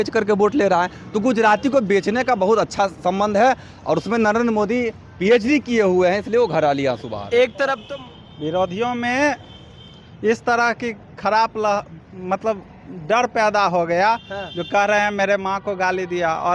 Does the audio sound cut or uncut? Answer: cut